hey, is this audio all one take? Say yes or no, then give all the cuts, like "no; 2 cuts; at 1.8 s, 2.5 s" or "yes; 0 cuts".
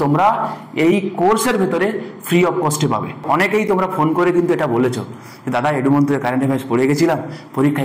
no; 1 cut; at 3.6 s